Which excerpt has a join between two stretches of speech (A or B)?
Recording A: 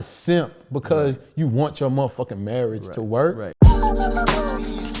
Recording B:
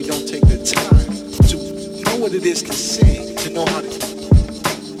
A